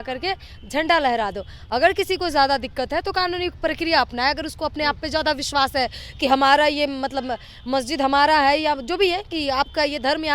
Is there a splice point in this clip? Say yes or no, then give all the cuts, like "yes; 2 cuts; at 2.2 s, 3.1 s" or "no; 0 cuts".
no; 0 cuts